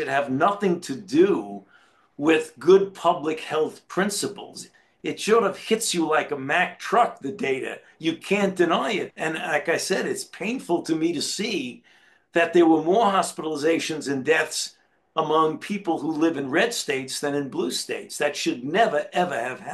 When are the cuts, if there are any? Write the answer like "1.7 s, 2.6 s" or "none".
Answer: 4.7 s, 9.1 s